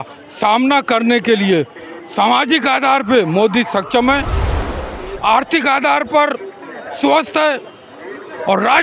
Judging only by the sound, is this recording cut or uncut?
uncut